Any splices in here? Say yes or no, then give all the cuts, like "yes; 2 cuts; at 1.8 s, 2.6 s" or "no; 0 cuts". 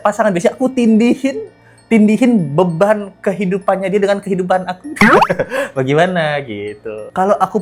no; 0 cuts